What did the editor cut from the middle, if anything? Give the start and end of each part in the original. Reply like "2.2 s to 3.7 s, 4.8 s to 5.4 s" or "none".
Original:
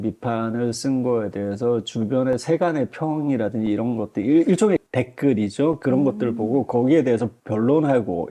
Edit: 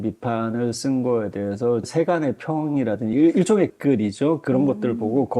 1.9 s to 2.4 s, 3.7 s to 4.2 s, 4.9 s to 5.1 s